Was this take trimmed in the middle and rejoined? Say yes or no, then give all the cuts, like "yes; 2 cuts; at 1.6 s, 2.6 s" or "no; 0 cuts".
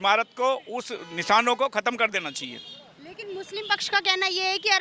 no; 0 cuts